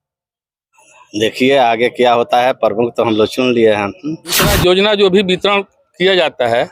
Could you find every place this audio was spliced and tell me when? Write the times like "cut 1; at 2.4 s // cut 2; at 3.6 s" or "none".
cut 1; at 4.5 s